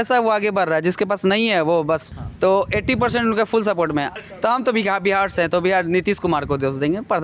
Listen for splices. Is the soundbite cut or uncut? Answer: cut